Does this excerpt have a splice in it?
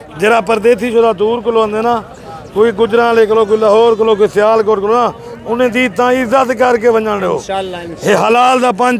no; 0 cuts

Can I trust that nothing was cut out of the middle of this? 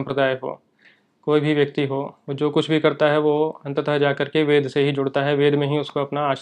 yes; 0 cuts

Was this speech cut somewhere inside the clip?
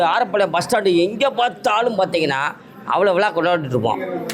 no; 0 cuts

